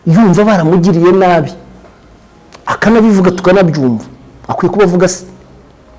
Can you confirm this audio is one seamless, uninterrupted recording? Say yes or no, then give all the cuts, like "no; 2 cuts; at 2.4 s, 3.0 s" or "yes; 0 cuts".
yes; 0 cuts